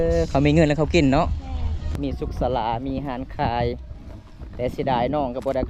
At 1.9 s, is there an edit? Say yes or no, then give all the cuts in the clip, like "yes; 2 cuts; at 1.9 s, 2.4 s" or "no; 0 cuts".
yes; 1 cut; at 1.9 s